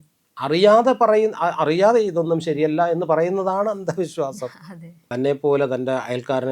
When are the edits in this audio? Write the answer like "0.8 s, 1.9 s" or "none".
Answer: 5.0 s